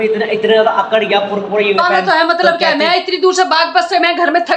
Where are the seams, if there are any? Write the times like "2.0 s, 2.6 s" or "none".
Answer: 1.8 s

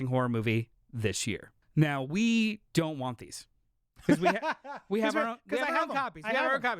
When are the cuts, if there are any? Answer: 1.6 s

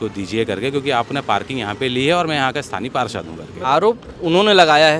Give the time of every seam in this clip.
3.5 s

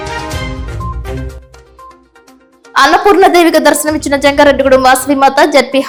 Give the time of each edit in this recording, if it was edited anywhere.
none

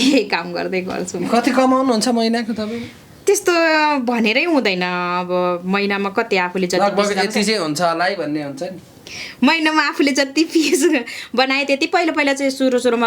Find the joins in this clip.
none

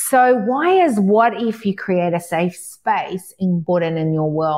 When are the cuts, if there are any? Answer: 3.6 s

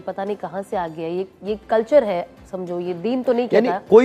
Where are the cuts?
none

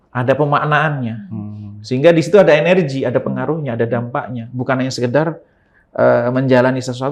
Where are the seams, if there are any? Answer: none

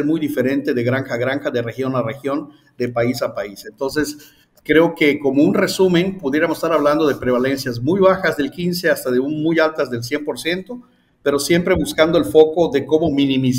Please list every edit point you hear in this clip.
none

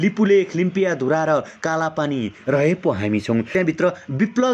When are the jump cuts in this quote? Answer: 3.5 s

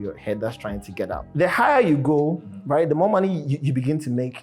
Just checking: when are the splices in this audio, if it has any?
1.2 s

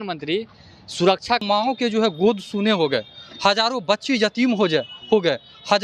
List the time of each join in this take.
1.4 s

